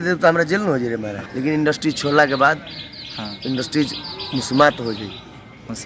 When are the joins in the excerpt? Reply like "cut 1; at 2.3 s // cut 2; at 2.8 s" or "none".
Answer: cut 1; at 1.2 s